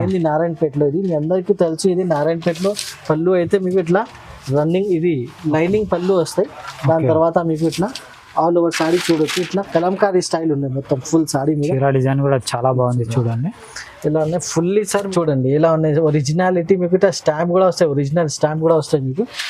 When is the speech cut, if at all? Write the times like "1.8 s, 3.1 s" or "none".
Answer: 15.1 s